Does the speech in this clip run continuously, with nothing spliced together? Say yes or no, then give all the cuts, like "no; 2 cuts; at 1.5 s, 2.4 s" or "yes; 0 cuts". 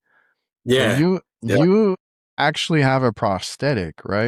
yes; 0 cuts